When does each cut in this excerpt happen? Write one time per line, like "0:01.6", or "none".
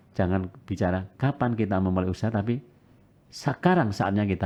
none